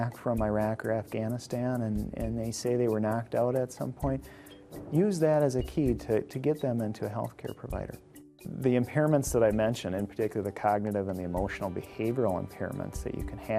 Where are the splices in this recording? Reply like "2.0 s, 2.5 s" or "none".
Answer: 8.3 s